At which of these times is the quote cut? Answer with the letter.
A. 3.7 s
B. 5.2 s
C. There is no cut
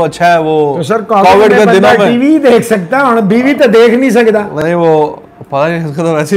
C